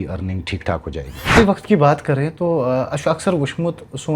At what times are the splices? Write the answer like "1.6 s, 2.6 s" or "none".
1.4 s